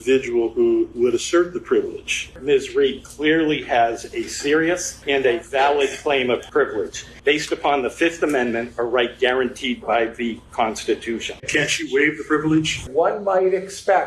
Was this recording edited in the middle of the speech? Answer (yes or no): yes